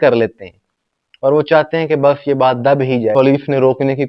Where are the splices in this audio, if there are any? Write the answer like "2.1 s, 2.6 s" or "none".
3.1 s